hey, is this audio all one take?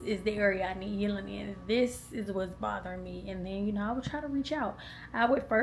yes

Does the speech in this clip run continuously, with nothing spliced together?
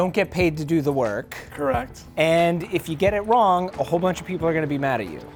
yes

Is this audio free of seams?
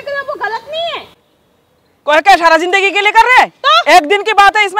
yes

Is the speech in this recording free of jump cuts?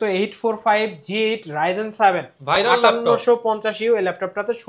yes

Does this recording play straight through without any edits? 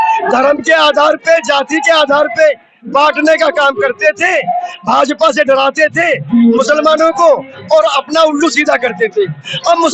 yes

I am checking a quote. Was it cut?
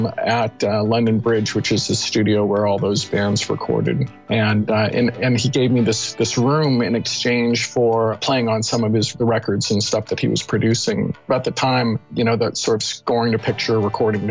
yes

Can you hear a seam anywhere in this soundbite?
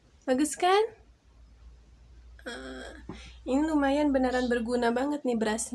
no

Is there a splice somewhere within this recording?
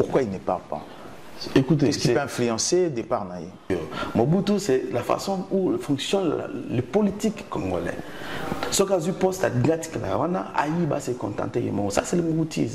yes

